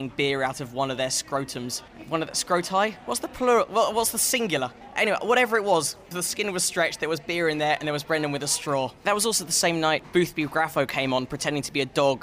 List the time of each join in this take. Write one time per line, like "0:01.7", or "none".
none